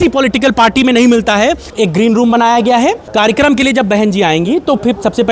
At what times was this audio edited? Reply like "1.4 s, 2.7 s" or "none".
1.7 s, 3.1 s

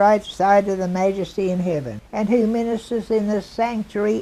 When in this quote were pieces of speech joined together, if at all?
2.0 s

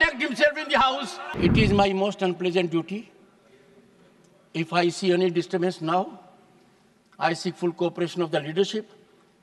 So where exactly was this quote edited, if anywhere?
1.3 s

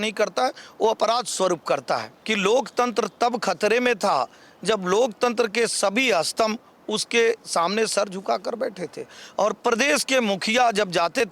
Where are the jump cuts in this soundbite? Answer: 2.2 s

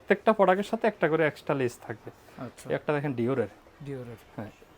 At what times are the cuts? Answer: none

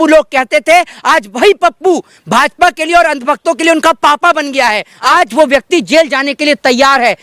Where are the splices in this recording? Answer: 5.1 s

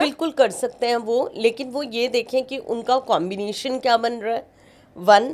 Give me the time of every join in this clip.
none

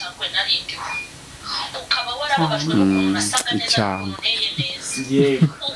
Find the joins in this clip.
none

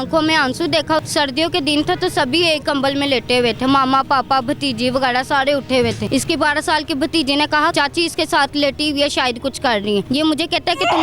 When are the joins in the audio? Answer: 1.0 s, 6.0 s, 7.7 s, 10.1 s

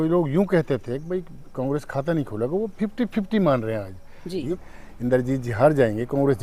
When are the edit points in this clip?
4.4 s

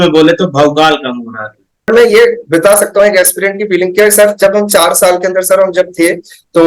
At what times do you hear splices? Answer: 1.9 s

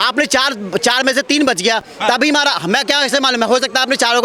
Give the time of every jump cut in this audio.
none

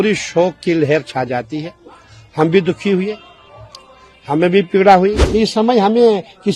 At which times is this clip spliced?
5.2 s

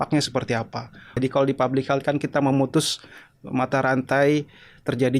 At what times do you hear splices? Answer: 1.2 s

